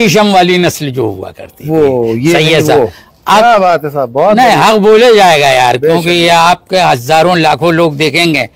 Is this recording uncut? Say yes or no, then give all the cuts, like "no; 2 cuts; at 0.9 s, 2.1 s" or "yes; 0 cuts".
yes; 0 cuts